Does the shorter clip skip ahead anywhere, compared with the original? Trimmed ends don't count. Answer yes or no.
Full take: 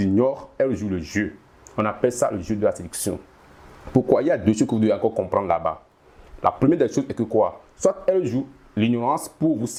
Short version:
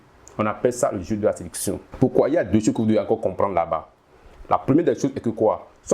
yes